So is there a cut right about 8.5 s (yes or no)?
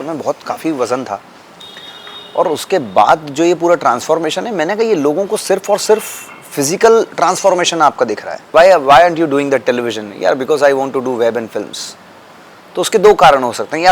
yes